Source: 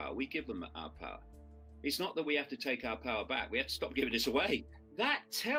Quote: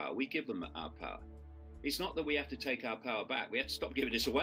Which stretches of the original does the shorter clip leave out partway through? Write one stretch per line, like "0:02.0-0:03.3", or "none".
none